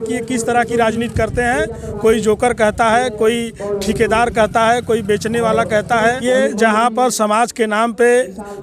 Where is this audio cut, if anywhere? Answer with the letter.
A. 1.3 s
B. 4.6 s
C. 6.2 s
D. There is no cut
C